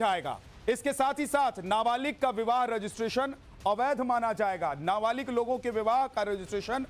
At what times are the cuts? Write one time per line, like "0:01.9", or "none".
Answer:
0:04.2